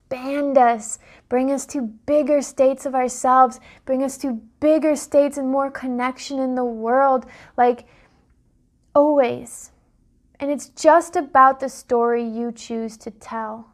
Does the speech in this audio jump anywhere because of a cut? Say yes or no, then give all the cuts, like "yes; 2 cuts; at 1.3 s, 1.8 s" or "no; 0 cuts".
no; 0 cuts